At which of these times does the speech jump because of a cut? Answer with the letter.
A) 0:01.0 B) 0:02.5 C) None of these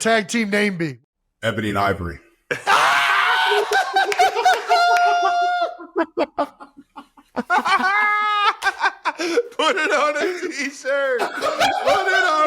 A